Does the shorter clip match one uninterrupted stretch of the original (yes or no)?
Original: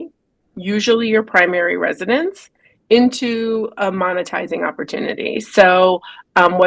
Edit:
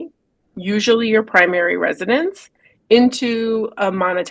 yes